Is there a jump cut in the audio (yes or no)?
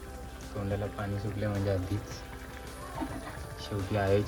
no